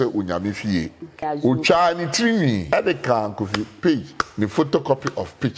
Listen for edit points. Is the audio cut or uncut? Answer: cut